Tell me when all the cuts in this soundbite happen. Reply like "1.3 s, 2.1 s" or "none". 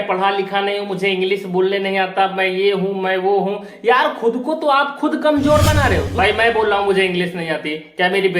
6.1 s